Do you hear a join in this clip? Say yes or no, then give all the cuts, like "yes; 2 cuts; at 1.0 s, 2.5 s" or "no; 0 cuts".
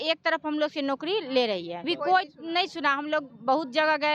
yes; 1 cut; at 1.9 s